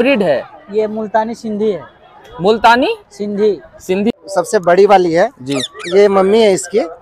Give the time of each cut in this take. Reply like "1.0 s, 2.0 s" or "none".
4.1 s